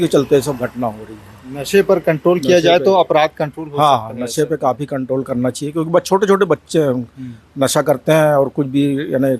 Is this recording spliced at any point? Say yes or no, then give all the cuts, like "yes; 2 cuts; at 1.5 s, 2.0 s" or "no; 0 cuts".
no; 0 cuts